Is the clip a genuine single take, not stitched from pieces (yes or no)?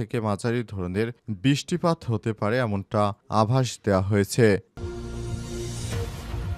no